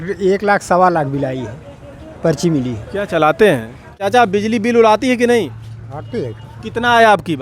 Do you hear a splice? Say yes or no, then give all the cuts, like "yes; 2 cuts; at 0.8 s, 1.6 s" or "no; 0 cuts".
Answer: yes; 1 cut; at 4.0 s